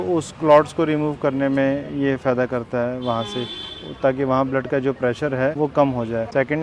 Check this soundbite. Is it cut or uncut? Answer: uncut